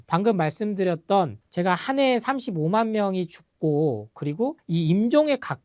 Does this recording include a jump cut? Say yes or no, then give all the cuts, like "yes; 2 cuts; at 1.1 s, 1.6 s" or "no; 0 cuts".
yes; 1 cut; at 4.6 s